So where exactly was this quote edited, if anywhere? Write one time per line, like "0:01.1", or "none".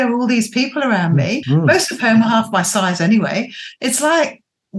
0:01.4